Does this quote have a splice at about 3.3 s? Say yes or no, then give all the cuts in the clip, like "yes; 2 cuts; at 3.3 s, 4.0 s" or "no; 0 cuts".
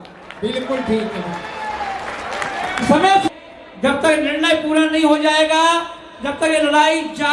yes; 1 cut; at 3.3 s